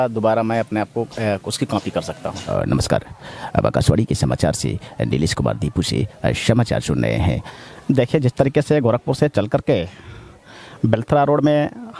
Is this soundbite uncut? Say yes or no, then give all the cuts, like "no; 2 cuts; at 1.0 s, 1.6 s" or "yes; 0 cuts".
no; 2 cuts; at 2.4 s, 7.5 s